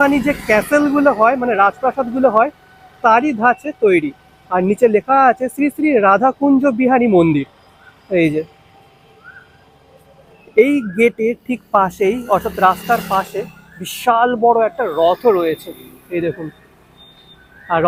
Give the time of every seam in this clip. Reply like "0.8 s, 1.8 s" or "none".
none